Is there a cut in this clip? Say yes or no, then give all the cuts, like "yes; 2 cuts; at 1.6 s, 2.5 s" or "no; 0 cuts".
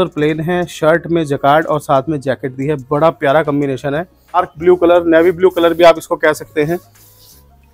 yes; 1 cut; at 4.5 s